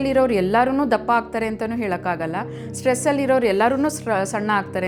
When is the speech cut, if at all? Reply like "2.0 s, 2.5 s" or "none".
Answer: none

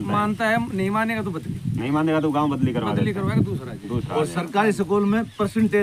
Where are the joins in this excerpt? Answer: none

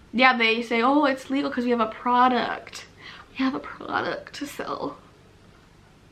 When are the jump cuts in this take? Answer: none

